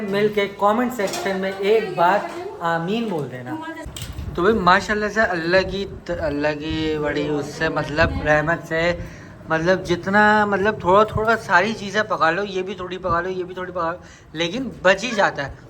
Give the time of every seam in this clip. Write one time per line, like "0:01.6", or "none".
0:03.8